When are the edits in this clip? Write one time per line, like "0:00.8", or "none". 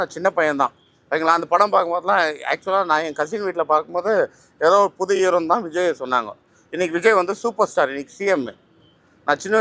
none

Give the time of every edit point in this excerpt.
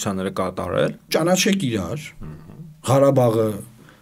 0:01.1

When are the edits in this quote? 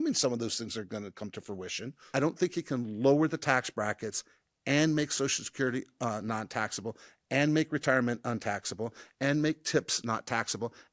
0:01.9

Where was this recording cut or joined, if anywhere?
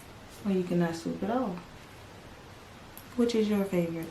0:02.5

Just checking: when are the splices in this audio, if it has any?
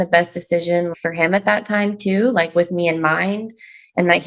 0:00.9

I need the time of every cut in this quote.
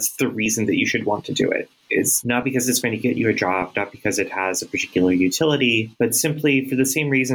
0:02.5
0:06.3

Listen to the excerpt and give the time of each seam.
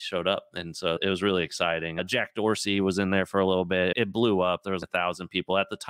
0:01.0
0:02.0
0:03.9
0:04.8

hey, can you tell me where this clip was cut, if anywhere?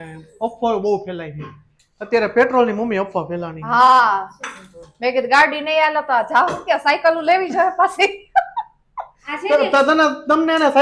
none

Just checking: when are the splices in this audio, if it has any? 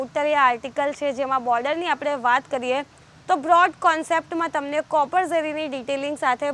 none

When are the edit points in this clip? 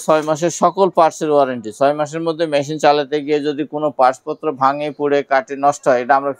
none

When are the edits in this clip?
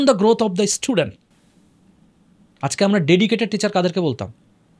none

